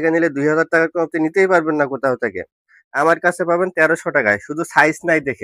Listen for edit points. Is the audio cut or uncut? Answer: uncut